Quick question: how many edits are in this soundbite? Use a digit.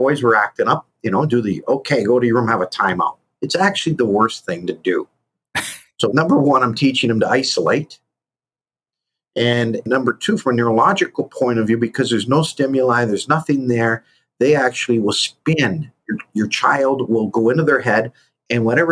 2